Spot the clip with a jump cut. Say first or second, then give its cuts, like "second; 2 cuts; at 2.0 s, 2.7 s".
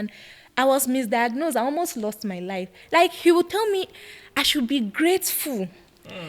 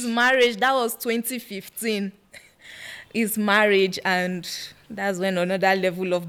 first; 1 cut; at 2.7 s